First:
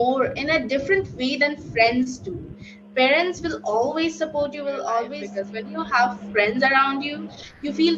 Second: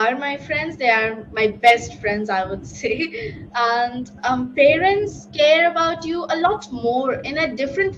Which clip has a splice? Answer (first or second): first